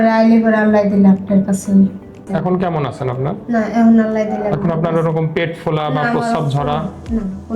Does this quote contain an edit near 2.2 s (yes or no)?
yes